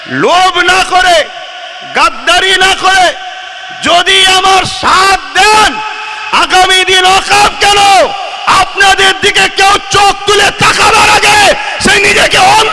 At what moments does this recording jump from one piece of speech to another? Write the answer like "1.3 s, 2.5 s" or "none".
none